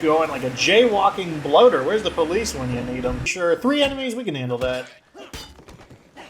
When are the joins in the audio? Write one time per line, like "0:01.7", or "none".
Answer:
0:03.3